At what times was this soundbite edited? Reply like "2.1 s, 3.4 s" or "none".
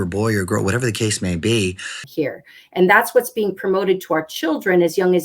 2.0 s